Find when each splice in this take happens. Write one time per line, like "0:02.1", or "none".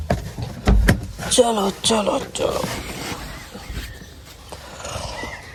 none